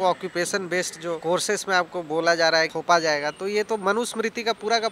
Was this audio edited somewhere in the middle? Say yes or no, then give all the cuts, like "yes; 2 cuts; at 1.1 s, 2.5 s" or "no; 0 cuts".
yes; 2 cuts; at 1.2 s, 2.8 s